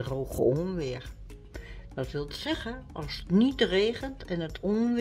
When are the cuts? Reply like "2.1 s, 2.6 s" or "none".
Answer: none